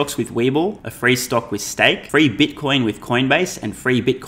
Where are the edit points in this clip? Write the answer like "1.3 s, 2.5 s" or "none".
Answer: 0.9 s, 2.0 s